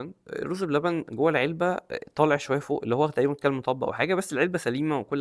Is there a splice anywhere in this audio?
no; 0 cuts

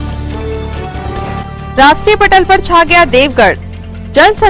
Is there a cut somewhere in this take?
yes; 1 cut; at 1.0 s

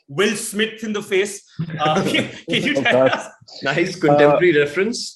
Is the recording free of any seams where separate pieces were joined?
yes; 0 cuts

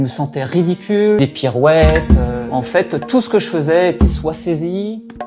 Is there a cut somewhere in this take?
yes; 1 cut; at 1.2 s

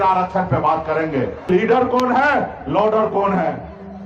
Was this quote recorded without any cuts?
no; 1 cut; at 1.5 s

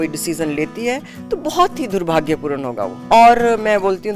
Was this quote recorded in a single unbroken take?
no; 1 cut; at 2.9 s

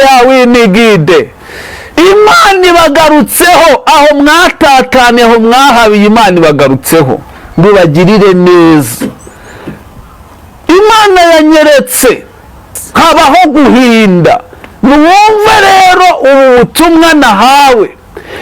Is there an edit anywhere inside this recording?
yes; 1 cut; at 12.8 s

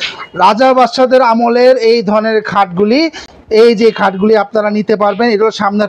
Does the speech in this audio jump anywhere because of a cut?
no; 0 cuts

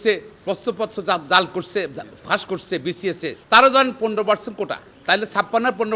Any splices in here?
yes; 2 cuts; at 3.4 s, 4.9 s

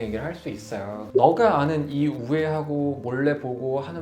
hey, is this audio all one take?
no; 1 cut; at 1.1 s

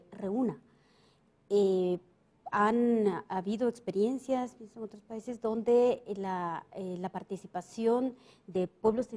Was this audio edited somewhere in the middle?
no; 0 cuts

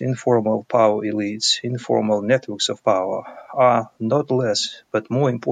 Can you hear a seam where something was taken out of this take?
no; 0 cuts

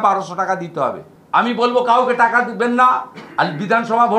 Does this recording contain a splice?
yes; 1 cut; at 1.1 s

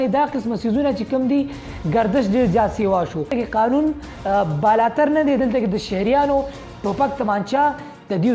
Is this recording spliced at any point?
yes; 1 cut; at 3.3 s

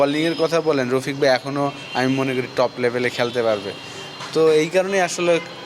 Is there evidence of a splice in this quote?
no; 0 cuts

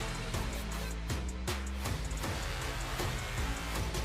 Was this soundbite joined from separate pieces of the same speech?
yes; 1 cut; at 1.9 s

